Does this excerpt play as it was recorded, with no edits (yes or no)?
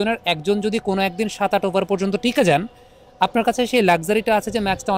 yes